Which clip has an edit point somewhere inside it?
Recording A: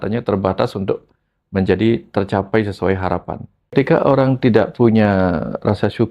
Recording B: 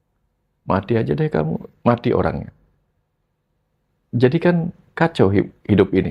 A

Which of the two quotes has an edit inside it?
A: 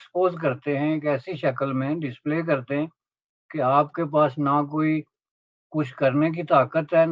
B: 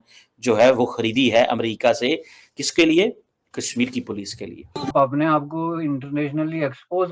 B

